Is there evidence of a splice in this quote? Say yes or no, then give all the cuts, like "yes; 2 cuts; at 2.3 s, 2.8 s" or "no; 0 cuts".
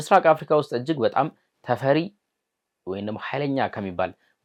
no; 0 cuts